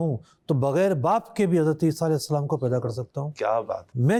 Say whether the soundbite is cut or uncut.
uncut